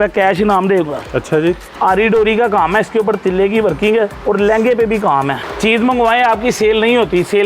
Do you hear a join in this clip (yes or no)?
yes